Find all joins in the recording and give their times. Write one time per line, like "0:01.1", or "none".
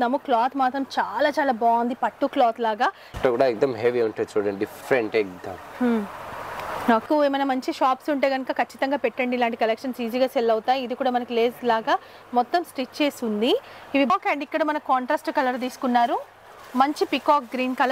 0:03.2
0:07.0
0:14.1